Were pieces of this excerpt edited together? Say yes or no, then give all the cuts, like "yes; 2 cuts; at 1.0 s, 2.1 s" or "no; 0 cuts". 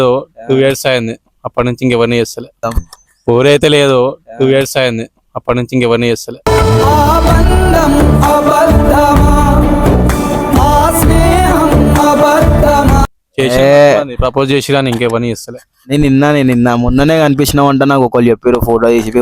no; 0 cuts